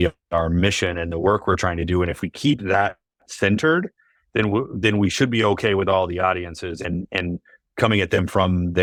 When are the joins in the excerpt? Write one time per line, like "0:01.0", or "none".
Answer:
none